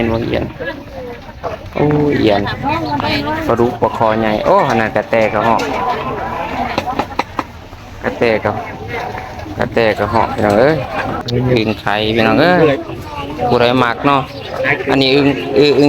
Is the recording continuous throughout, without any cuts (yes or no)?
no